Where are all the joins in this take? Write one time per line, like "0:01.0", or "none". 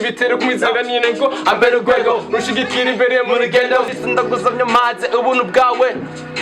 0:03.9

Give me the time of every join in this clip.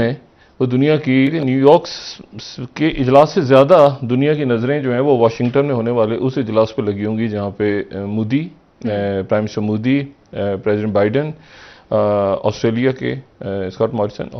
0:01.4

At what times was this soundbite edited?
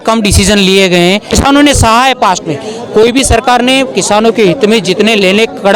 0:01.2

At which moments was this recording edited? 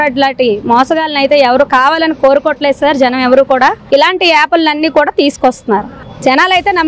0:03.8

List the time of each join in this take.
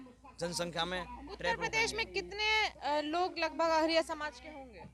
none

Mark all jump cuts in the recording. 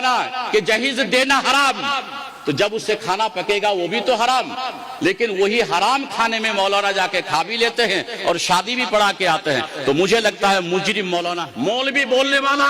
0:11.4

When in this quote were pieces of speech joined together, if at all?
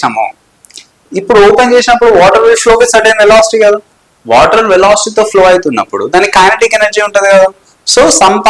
none

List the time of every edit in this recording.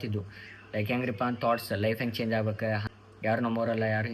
0:02.8

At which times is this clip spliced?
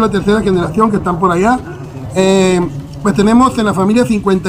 none

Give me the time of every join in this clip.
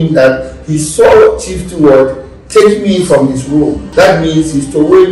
0:03.8

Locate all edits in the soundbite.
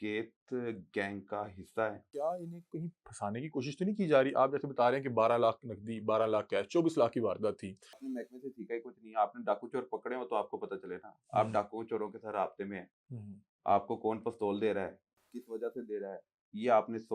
0:02.0
0:08.1

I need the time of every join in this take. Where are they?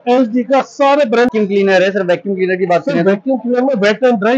0:01.3

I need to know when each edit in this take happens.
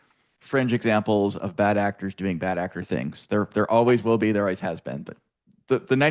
none

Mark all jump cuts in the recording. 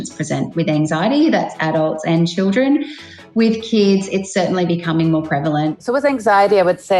0:05.8

